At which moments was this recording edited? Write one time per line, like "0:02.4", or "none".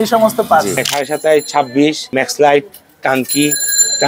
0:00.9
0:02.0